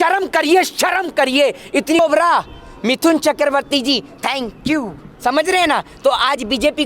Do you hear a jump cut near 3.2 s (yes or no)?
no